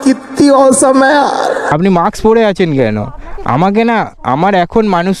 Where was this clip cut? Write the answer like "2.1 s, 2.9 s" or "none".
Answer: 1.7 s

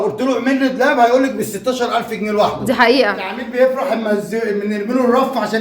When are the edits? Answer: 3.4 s

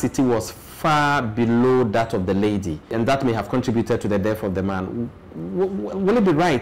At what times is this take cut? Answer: none

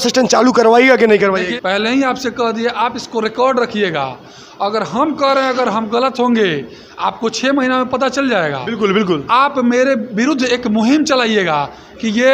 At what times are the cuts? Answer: 1.5 s

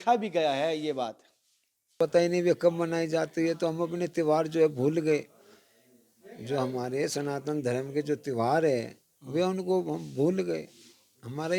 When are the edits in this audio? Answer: 1.9 s

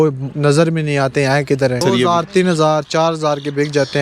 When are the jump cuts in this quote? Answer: 1.8 s

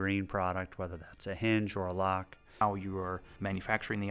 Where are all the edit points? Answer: 2.6 s, 3.3 s

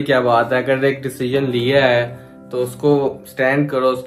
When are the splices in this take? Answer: none

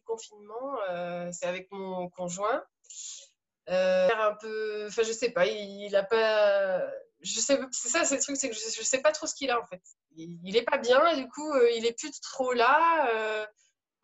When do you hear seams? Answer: 4.1 s

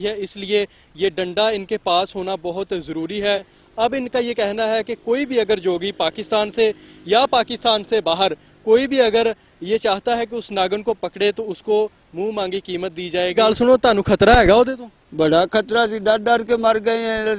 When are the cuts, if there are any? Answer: 3.5 s, 13.3 s

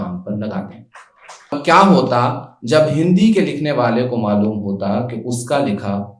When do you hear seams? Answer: 1.5 s

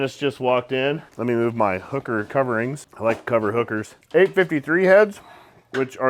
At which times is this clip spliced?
1.1 s, 3.9 s

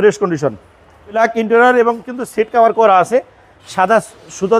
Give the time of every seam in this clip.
1.1 s

